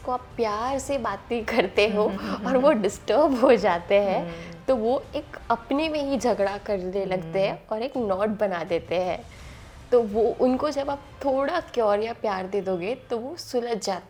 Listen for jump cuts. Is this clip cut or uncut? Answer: uncut